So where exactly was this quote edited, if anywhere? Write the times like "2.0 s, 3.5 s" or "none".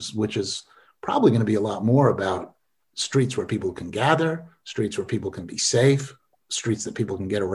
none